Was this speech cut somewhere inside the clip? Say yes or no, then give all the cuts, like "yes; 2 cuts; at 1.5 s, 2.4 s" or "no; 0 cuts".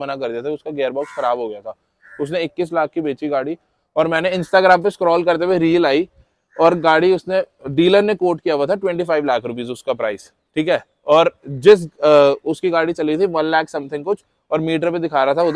no; 0 cuts